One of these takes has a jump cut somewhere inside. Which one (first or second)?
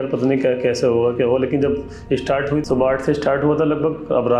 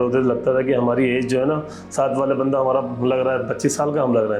first